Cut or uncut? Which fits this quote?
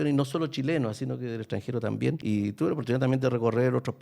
cut